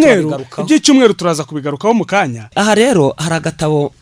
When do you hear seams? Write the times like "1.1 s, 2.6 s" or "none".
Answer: 2.5 s